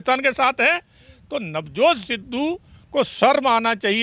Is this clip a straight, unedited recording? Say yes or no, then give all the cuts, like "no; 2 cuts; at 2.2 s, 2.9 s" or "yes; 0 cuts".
yes; 0 cuts